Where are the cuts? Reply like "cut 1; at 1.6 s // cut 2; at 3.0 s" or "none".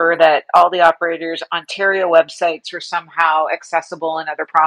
none